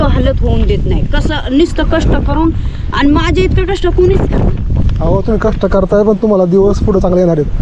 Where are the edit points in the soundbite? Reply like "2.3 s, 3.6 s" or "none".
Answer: none